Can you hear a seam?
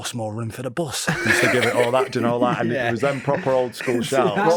no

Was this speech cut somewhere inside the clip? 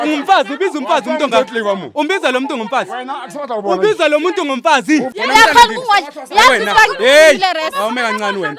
yes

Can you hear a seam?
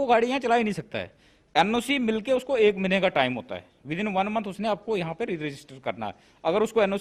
no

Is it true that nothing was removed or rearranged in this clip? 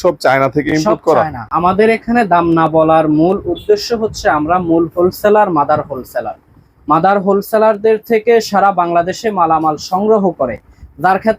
no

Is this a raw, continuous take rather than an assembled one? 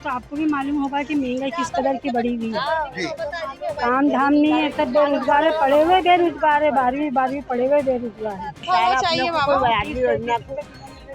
no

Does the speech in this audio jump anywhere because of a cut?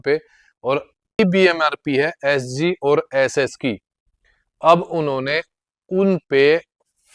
yes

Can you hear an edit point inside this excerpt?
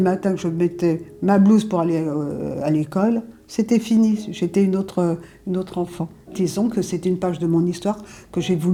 no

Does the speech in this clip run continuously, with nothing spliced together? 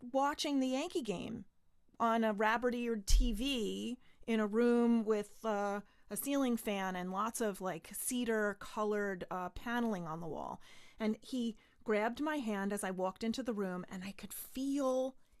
yes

